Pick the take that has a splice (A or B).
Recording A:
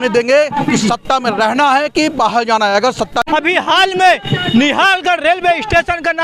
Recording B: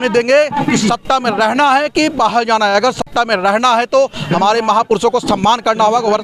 A